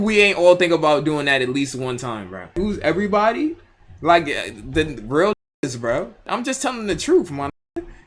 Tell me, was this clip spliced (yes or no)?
yes